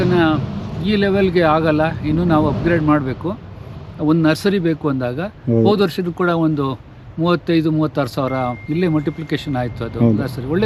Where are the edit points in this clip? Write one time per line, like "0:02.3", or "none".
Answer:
none